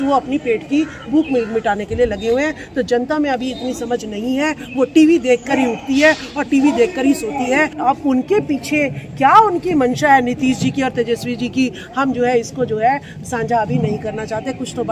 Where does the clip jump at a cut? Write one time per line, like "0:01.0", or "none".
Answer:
0:07.7